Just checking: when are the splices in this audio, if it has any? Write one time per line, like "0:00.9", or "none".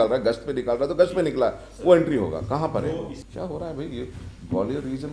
0:03.2